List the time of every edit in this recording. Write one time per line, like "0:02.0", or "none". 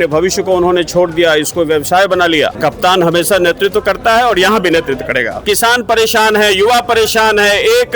0:02.6
0:05.4